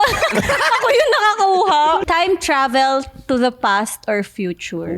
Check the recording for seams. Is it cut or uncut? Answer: uncut